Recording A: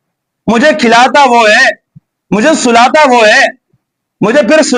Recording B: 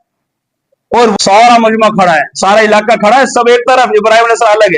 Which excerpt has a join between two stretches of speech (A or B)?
B